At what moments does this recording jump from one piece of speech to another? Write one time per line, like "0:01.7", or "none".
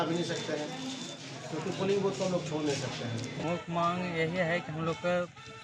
0:03.4